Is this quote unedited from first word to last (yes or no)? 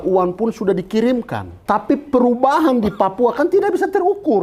no